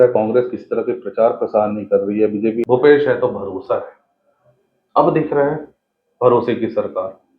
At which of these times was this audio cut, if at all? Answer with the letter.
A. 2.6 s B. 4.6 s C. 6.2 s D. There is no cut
A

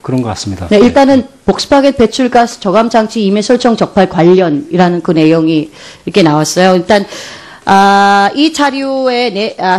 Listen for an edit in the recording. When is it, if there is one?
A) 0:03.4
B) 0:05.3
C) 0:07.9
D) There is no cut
A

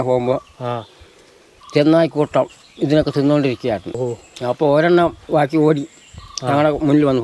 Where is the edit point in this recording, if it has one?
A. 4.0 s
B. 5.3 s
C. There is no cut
A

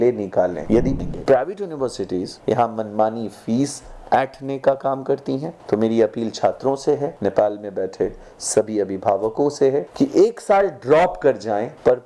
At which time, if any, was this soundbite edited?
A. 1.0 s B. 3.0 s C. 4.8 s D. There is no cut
A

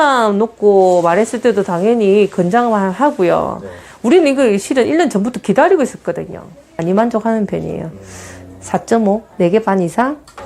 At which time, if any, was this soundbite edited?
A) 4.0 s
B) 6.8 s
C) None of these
B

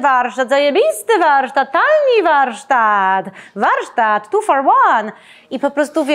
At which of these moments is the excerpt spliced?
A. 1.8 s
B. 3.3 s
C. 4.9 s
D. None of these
D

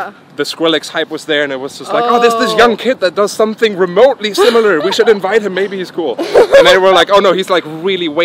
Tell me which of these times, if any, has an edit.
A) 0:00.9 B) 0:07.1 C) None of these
C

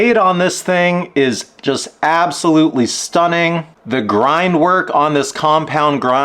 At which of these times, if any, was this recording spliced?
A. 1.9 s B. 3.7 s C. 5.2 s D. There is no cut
B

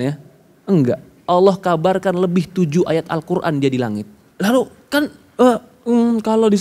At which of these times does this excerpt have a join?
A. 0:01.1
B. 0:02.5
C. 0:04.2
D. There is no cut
C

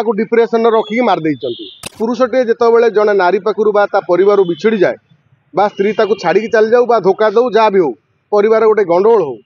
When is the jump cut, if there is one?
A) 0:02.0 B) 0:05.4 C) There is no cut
A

